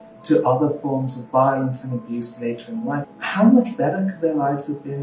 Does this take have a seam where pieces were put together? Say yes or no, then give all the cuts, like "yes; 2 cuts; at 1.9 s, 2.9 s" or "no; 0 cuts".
yes; 1 cut; at 3.0 s